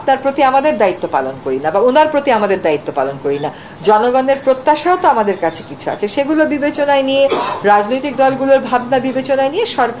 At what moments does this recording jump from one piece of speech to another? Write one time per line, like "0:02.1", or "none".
none